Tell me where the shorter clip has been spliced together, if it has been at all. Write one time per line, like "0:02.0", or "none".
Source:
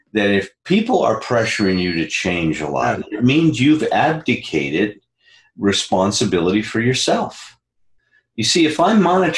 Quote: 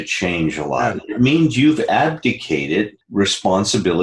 0:03.0